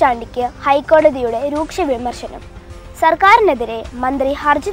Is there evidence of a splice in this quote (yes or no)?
no